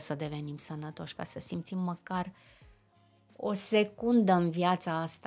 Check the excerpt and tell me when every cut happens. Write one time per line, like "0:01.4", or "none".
none

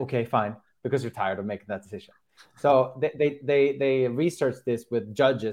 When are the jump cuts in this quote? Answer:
none

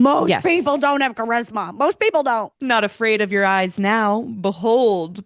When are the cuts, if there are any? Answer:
0:02.5

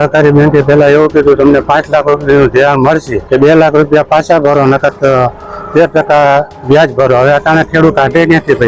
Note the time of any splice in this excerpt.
0:03.1

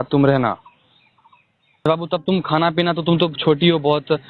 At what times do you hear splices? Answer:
0:01.9

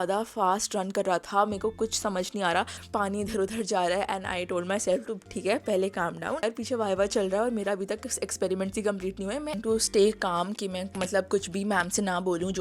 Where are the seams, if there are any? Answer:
0:02.8
0:06.4
0:09.6

